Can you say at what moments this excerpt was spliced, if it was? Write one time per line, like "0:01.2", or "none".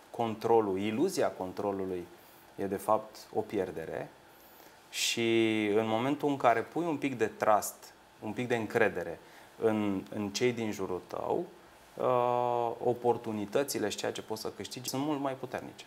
0:14.8